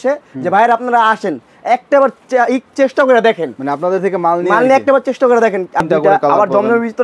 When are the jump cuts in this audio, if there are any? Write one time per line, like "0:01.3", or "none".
0:05.9